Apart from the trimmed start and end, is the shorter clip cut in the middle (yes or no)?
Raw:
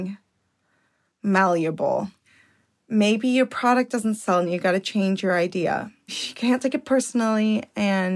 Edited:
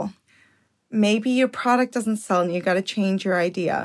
no